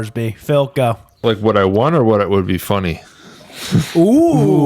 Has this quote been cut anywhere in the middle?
yes; 1 cut; at 1.2 s

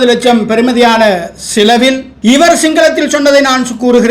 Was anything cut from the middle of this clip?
yes; 1 cut; at 2.1 s

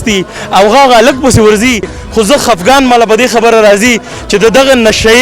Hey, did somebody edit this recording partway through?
yes; 1 cut; at 2.0 s

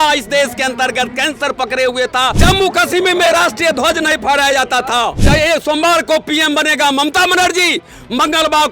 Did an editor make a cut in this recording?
yes; 2 cuts; at 2.4 s, 5.2 s

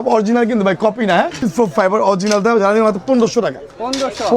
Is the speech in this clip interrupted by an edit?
yes; 1 cut; at 1.4 s

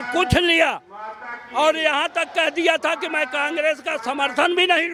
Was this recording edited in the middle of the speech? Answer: no; 0 cuts

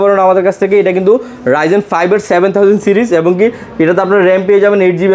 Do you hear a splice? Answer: no; 0 cuts

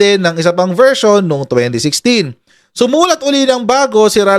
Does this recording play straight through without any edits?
yes; 0 cuts

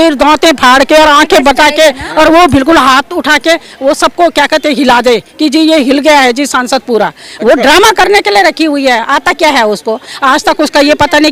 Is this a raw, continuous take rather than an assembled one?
yes; 0 cuts

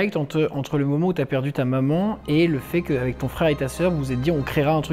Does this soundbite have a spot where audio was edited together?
no; 0 cuts

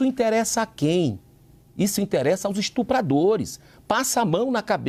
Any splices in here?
no; 0 cuts

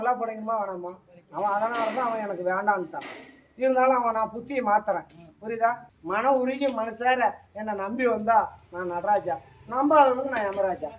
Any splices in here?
yes; 1 cut; at 5.9 s

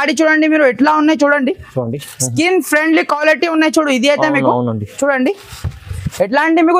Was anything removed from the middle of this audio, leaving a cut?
no; 0 cuts

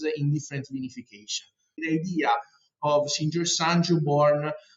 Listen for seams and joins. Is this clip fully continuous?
no; 1 cut; at 1.8 s

